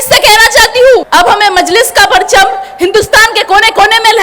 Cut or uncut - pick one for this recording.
cut